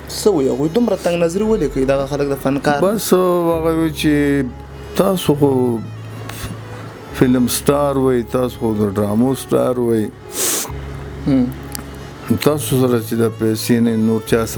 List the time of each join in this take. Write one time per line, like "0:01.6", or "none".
none